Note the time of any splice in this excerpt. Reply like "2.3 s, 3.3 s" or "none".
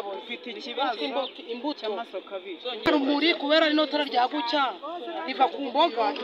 2.9 s

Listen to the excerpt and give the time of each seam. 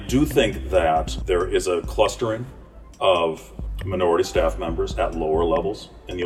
1.1 s

